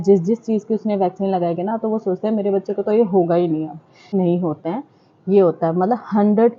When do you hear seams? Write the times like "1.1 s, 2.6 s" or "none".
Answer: 4.1 s